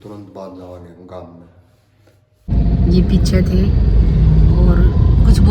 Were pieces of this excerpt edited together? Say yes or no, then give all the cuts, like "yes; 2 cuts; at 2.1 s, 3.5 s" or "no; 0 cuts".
yes; 1 cut; at 2.5 s